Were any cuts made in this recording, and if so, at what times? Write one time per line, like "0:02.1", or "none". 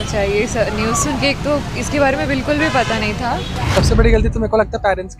0:03.6